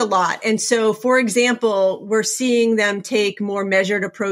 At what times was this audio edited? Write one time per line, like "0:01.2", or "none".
none